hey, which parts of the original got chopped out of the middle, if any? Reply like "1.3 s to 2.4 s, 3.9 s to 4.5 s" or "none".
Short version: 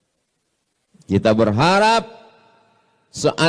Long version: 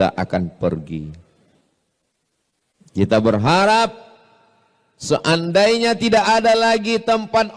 none